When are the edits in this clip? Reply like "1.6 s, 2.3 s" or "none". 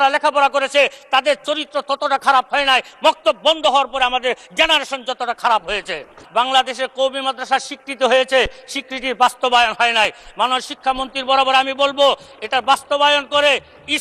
6.2 s